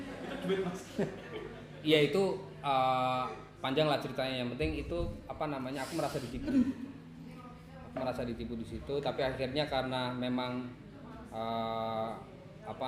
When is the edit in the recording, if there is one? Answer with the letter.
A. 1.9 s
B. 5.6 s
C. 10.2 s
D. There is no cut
D